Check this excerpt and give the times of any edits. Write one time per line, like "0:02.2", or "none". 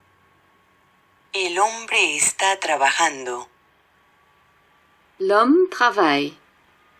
0:01.3

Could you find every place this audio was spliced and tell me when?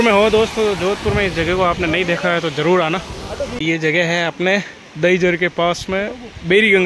0:03.5

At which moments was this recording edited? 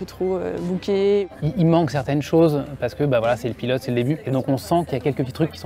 0:01.3
0:04.2

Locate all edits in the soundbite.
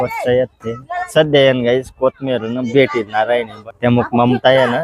0:01.1
0:03.6

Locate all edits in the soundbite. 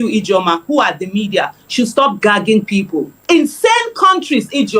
0:03.1

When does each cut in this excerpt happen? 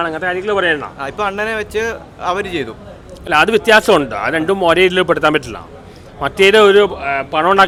none

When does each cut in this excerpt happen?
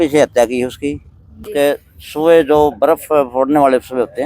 0:01.4

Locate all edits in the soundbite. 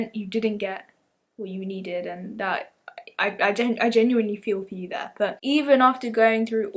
0:05.4

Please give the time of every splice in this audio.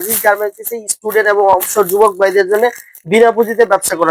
none

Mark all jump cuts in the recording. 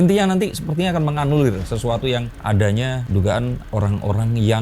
0:02.3

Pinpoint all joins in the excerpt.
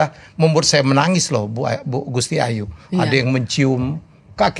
none

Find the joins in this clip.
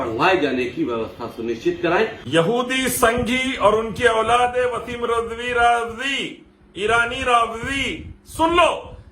0:02.2

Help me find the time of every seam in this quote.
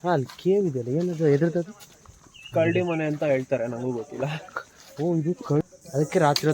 0:05.6

